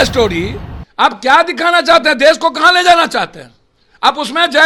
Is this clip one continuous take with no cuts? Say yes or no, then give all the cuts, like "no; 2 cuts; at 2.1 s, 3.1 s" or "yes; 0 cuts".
yes; 0 cuts